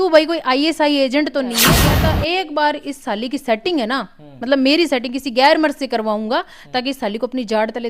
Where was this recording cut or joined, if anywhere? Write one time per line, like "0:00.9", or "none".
0:01.8